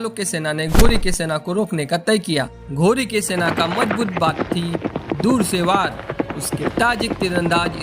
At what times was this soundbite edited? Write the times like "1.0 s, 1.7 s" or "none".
2.6 s